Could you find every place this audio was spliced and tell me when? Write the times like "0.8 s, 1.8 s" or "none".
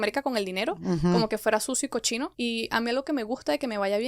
2.3 s

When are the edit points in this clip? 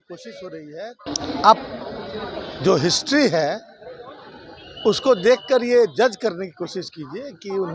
1.0 s

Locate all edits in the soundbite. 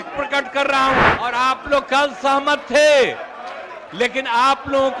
1.2 s

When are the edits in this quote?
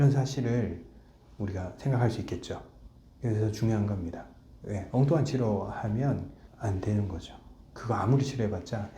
6.4 s

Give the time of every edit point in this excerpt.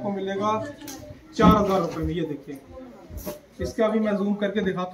none

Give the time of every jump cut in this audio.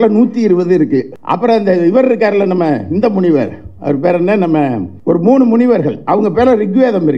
1.2 s, 4.9 s

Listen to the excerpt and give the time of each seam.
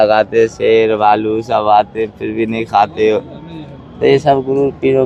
none

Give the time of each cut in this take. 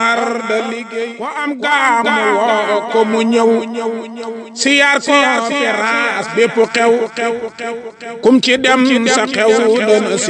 1.4 s

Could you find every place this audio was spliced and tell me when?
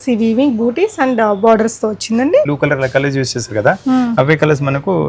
2.5 s

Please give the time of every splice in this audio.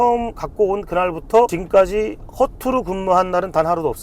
1.6 s

